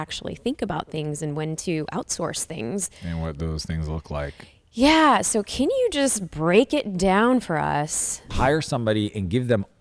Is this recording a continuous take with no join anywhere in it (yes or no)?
no